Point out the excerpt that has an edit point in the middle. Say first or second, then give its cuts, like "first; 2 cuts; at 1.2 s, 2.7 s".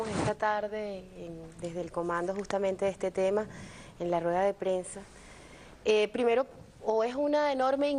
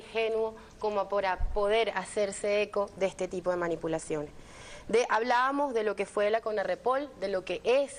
first; 1 cut; at 6.1 s